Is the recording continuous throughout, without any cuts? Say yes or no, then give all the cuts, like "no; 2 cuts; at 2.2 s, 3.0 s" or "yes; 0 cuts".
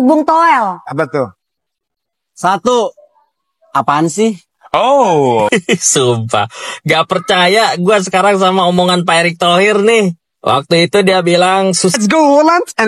no; 2 cuts; at 5.5 s, 11.9 s